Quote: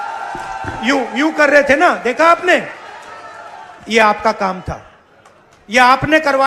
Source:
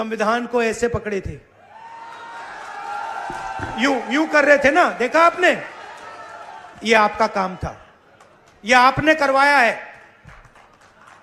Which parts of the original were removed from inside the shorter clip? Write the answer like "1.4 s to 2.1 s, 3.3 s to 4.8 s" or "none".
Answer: none